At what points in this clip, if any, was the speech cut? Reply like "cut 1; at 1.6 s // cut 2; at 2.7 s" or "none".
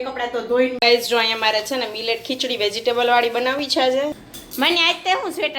cut 1; at 0.8 s // cut 2; at 4.2 s